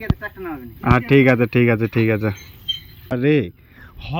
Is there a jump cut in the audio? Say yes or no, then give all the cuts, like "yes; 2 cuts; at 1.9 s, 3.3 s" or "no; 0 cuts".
yes; 1 cut; at 3.1 s